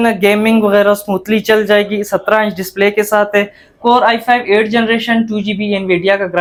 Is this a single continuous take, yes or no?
yes